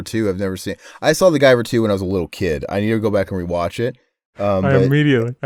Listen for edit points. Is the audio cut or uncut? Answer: uncut